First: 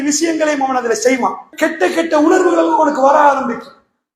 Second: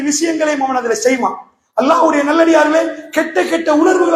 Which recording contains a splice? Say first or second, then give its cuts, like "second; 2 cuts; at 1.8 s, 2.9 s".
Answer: first; 1 cut; at 1.5 s